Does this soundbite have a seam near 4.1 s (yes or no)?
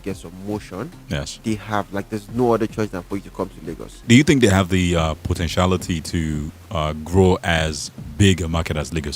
yes